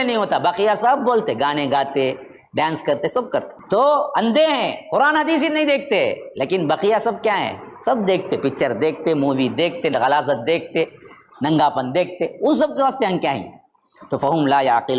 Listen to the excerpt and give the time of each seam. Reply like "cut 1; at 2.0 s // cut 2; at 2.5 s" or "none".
cut 1; at 3.5 s